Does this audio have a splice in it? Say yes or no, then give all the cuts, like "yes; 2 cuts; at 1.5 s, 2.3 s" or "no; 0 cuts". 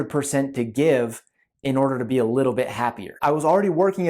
yes; 1 cut; at 3.2 s